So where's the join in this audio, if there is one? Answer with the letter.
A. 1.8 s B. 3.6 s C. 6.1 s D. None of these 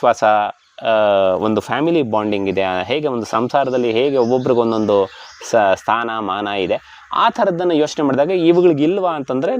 D